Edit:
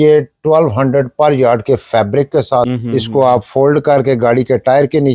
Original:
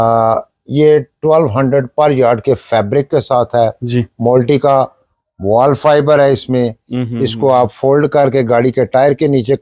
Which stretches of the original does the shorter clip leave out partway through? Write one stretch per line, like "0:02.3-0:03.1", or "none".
0:03.5-0:07.0